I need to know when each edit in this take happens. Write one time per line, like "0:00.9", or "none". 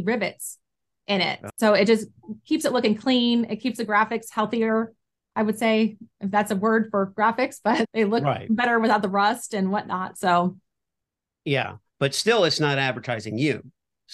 0:01.4